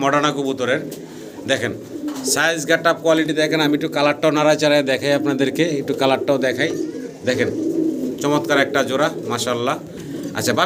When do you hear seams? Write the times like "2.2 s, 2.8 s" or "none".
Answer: none